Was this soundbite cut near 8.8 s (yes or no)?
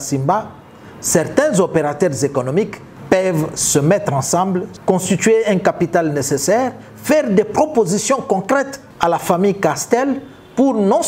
yes